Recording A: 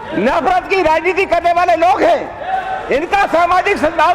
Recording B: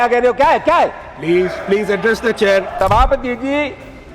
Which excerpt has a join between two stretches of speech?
B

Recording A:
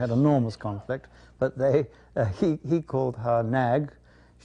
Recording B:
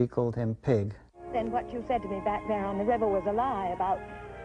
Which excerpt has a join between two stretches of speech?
B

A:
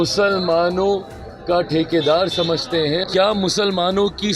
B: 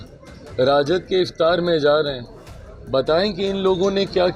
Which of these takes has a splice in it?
A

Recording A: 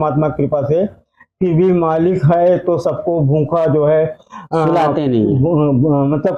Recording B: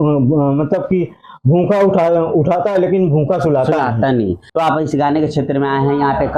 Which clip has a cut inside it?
B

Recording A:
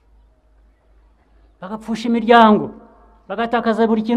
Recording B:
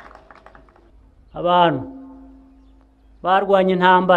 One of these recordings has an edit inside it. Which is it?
B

